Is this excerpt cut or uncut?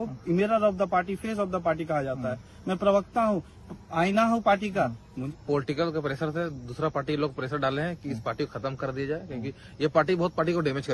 cut